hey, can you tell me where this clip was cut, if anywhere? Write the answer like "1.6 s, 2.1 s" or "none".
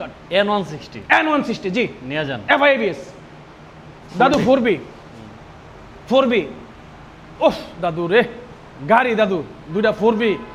none